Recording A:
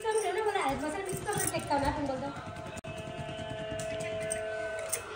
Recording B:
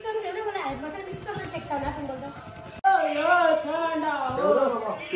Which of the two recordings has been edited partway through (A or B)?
B